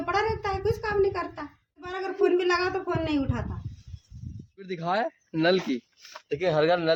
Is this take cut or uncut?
uncut